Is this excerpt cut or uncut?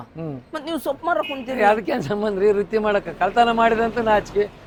uncut